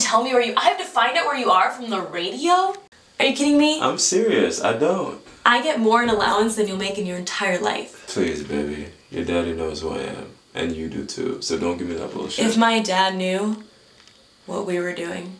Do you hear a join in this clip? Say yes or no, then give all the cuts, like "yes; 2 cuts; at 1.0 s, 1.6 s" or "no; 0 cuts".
yes; 1 cut; at 2.9 s